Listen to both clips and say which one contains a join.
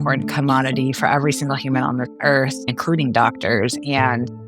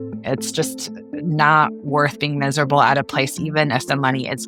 first; 1 cut; at 2.7 s

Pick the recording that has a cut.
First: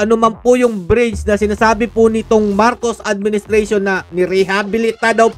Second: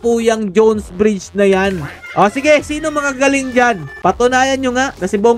second; 2 cuts; at 1.9 s, 3.9 s

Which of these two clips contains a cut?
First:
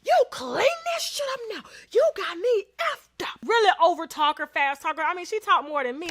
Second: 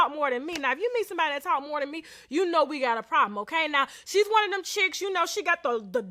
first; 1 cut; at 3.4 s

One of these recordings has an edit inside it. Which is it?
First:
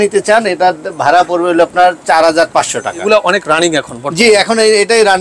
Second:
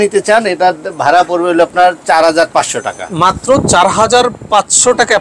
first; 1 cut; at 3.0 s

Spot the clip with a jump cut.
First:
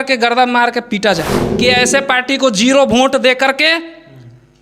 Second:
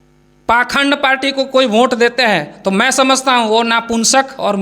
first; 1 cut; at 1.4 s

